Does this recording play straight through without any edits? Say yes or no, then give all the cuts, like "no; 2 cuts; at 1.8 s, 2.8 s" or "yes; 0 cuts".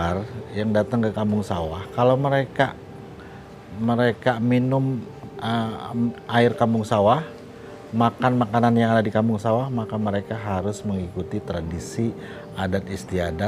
yes; 0 cuts